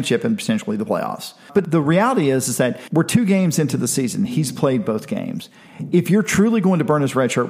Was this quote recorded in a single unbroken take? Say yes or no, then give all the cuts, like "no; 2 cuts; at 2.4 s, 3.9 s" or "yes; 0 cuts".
no; 2 cuts; at 1.6 s, 2.8 s